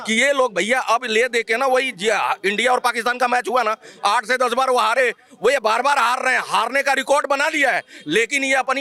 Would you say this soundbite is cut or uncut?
uncut